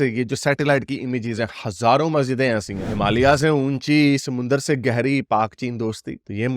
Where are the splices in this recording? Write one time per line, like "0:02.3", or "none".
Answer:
0:02.8